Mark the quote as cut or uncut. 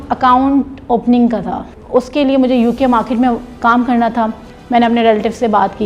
cut